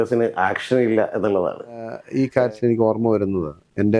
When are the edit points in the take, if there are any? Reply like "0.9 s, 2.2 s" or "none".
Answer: 2.0 s